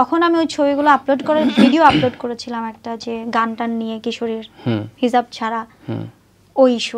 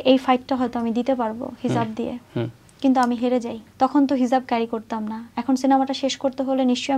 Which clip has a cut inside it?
second; 2 cuts; at 2.6 s, 3.6 s

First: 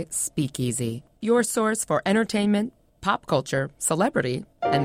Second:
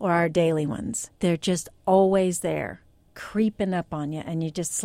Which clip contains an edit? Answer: second; 1 cut; at 1.0 s

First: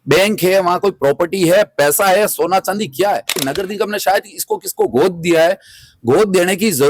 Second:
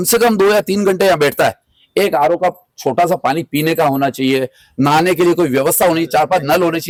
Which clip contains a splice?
first; 1 cut; at 3.5 s

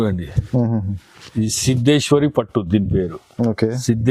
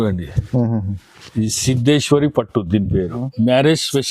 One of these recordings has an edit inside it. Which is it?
second; 1 cut; at 3.2 s

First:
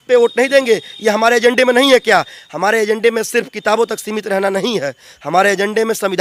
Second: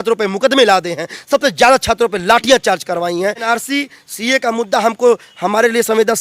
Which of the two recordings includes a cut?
second; 1 cut; at 3.5 s

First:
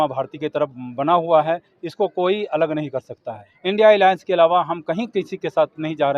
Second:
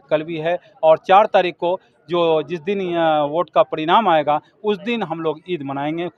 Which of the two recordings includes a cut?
first; 1 cut; at 3.5 s

